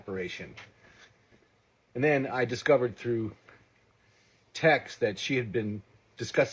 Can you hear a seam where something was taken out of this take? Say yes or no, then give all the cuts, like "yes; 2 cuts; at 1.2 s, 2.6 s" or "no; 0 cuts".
yes; 1 cut; at 2.1 s